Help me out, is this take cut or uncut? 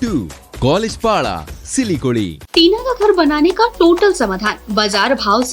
cut